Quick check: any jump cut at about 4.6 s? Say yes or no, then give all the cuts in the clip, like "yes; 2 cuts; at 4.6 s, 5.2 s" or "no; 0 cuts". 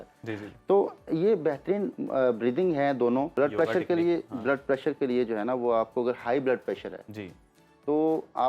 no; 1 cut; at 3.3 s